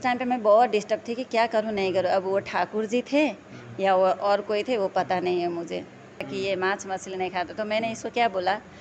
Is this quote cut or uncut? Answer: cut